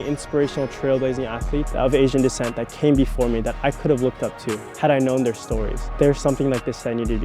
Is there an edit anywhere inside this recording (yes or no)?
yes